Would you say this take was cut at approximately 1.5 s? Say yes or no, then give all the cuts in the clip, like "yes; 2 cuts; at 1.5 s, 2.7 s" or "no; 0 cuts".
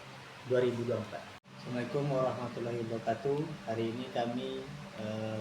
yes; 1 cut; at 1.5 s